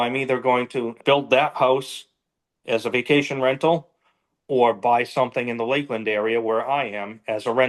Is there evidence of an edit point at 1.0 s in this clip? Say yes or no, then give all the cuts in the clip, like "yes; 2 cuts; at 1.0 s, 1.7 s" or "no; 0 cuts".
yes; 1 cut; at 1.0 s